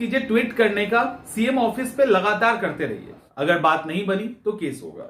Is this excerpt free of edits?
no; 1 cut; at 3.2 s

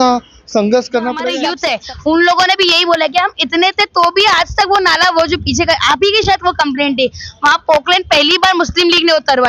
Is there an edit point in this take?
yes; 1 cut; at 1.5 s

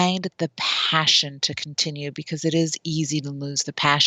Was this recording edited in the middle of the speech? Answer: no; 0 cuts

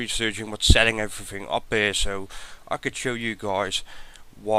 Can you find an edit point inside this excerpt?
no; 0 cuts

